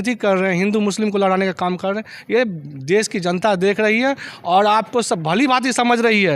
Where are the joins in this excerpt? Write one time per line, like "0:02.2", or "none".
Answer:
none